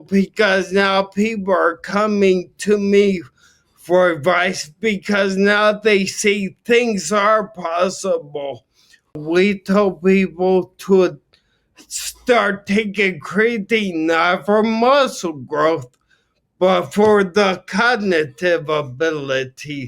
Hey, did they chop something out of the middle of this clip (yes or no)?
yes